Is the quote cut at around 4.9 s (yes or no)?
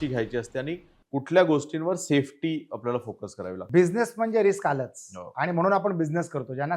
no